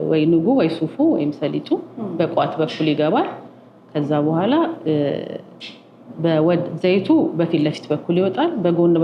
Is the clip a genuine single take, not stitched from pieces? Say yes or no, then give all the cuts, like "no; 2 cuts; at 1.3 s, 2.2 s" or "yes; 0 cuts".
yes; 0 cuts